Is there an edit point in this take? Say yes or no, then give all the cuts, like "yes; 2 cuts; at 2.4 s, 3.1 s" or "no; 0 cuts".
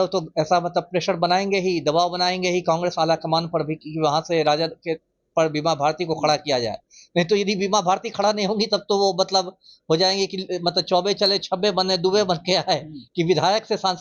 no; 0 cuts